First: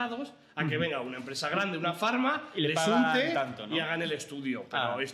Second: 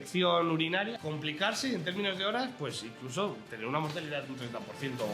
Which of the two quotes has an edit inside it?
second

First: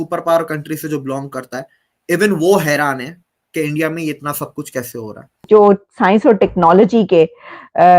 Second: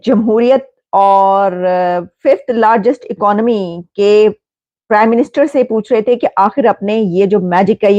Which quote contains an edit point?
first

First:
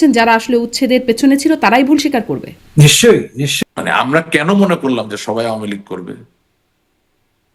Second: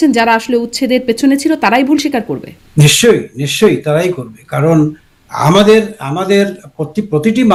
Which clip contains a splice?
first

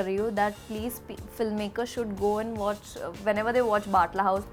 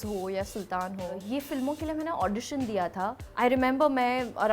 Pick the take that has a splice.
second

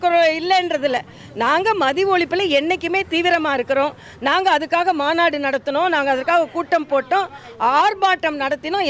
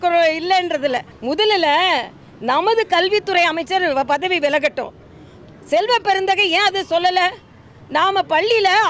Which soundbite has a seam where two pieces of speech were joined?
second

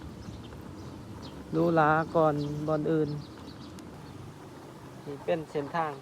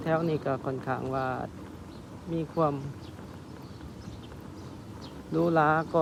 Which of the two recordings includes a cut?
first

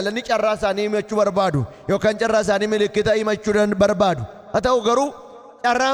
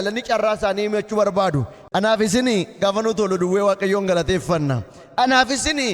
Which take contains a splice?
second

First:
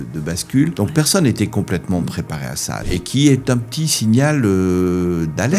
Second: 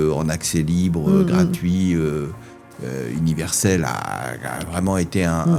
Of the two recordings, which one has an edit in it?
first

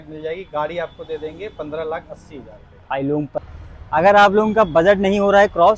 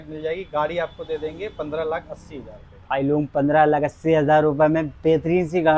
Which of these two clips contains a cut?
first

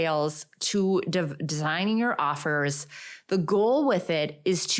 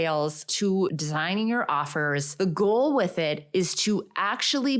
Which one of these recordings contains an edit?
second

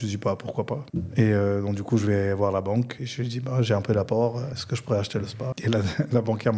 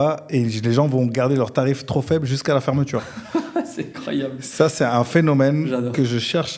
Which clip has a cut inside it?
first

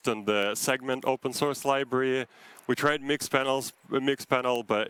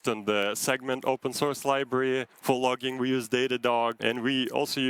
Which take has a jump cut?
second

